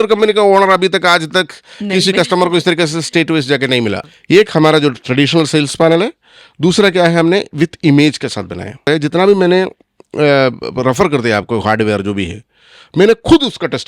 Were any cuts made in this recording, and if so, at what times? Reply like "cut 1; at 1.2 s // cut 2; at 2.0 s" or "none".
cut 1; at 4.1 s // cut 2; at 8.8 s